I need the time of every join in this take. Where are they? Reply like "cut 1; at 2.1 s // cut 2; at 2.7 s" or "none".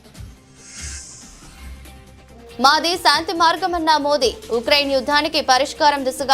none

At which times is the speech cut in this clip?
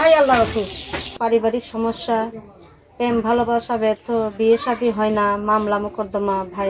cut 1; at 1.1 s

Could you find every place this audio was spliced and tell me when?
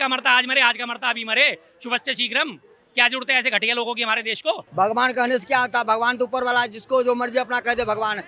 cut 1; at 4.7 s

